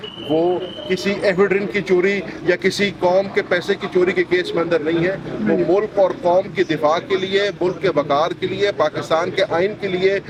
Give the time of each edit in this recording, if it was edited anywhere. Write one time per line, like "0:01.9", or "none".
none

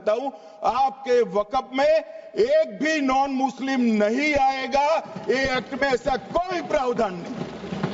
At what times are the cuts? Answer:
none

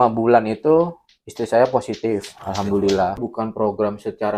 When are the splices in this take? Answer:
0:03.2

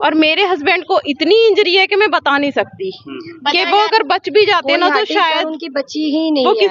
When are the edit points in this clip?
none

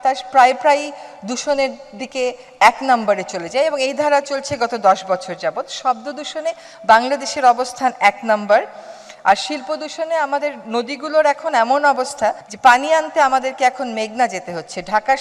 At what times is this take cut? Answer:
none

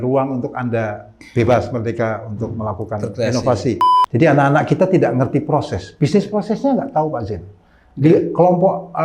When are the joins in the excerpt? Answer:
0:03.9

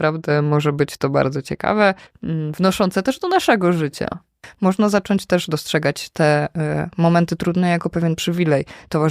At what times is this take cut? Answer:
0:02.1
0:04.5

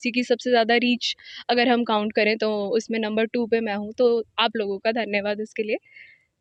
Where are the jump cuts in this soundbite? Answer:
none

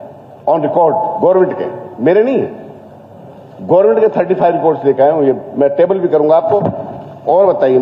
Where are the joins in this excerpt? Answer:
none

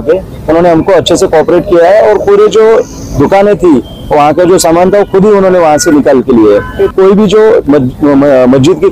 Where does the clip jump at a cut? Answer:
0:06.8

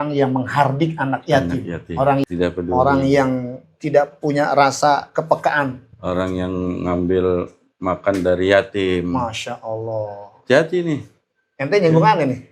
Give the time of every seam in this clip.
0:02.2

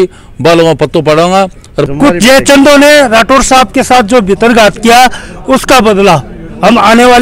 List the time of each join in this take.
0:01.8

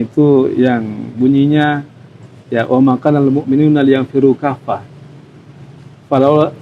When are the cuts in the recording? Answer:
none

